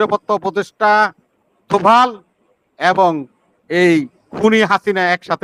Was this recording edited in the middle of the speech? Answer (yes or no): no